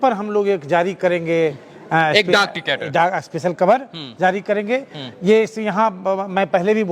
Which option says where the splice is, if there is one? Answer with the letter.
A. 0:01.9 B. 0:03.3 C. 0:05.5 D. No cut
D